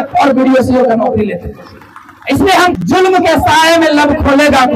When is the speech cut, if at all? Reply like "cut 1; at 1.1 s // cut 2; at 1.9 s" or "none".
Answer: cut 1; at 2.8 s